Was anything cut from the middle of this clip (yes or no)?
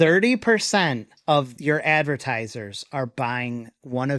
yes